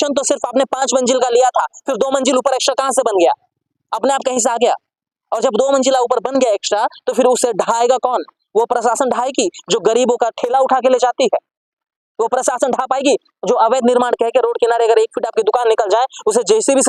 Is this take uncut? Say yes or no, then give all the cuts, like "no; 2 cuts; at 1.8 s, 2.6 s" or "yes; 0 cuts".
yes; 0 cuts